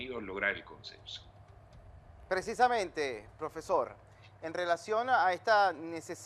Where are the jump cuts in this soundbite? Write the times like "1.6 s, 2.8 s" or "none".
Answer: 1.2 s